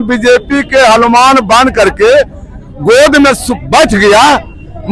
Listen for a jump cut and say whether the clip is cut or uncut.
uncut